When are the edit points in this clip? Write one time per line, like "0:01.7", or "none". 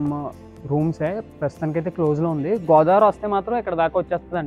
none